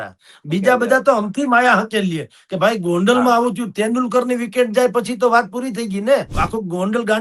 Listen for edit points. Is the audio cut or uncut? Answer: cut